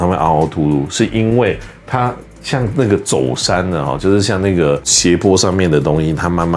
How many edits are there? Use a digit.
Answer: 0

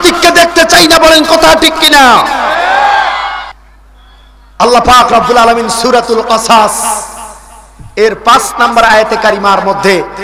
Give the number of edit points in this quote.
1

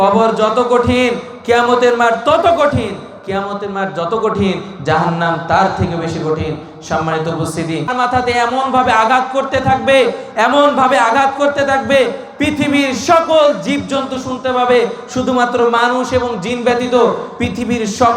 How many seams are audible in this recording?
1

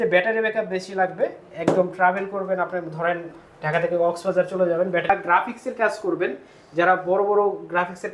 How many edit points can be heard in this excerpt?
1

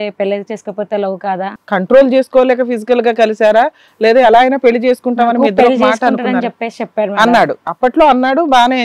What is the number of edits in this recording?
1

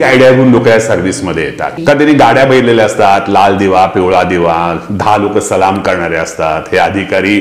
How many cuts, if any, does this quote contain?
1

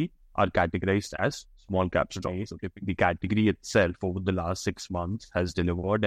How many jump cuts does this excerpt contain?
1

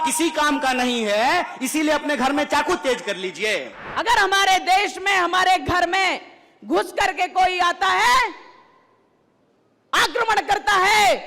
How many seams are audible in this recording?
1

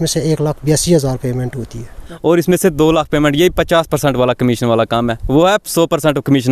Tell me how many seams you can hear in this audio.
1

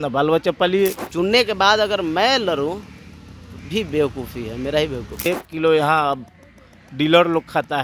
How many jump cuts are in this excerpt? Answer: 2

